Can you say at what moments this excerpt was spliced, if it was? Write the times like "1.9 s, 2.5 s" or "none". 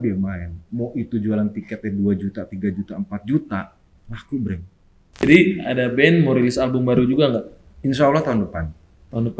5.2 s

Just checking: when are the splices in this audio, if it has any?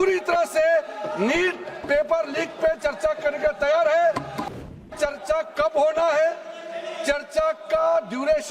4.4 s

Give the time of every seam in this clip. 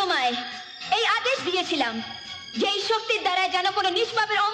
none

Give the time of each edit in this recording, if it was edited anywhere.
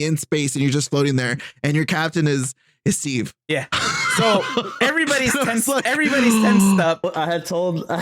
6.9 s

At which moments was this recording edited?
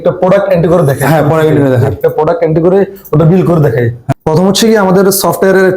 none

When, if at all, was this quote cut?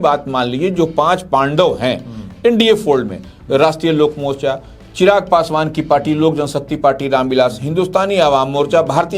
none

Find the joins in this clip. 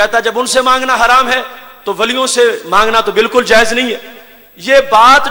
none

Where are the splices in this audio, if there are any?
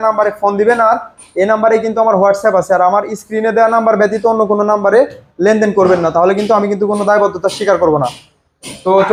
none

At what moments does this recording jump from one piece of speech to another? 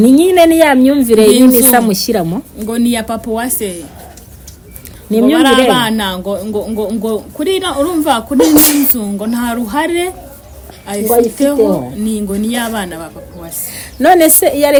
none

